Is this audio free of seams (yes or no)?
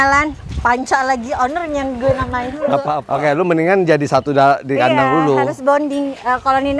no